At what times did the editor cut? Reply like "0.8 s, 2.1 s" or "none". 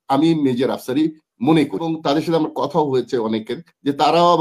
1.9 s

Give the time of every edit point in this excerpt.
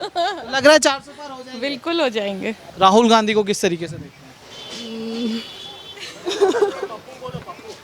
2.7 s

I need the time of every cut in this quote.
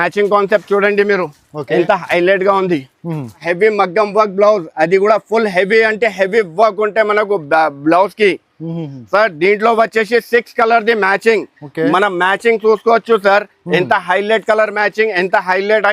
3.4 s

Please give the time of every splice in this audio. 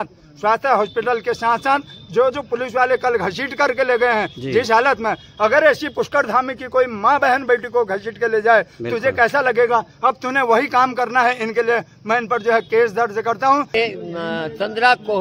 13.7 s

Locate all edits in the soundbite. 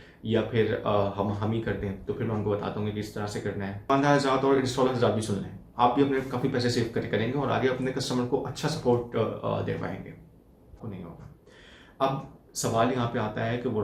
3.9 s, 10.8 s

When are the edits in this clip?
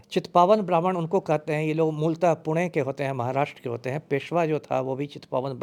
none

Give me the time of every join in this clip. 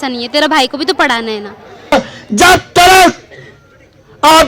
1.9 s

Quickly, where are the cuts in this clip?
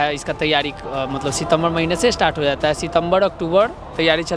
none

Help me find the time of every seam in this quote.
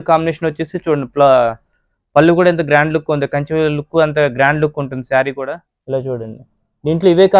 5.7 s

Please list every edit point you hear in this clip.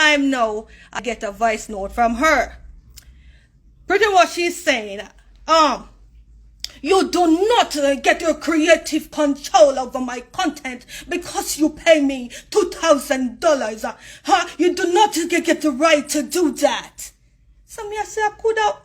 1.0 s

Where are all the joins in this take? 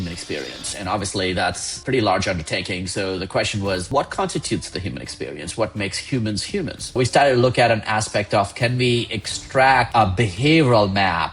1.7 s, 3.9 s, 7.0 s, 9.9 s

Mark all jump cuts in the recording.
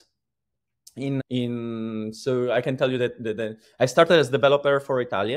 1.2 s

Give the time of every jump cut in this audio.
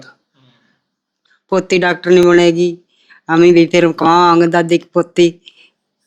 1.2 s

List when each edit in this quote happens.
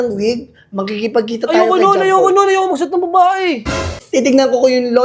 4.0 s

